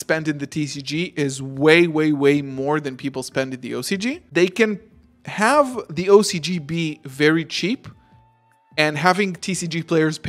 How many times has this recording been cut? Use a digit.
1